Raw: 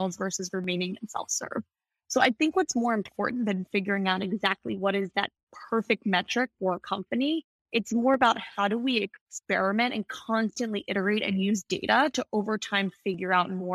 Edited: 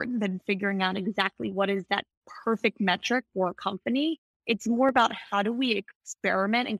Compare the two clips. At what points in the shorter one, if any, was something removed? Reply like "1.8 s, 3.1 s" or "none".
none